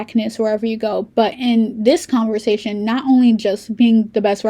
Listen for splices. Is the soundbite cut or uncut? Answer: uncut